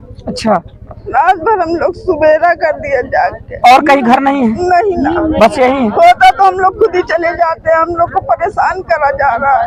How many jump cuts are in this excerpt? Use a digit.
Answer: 0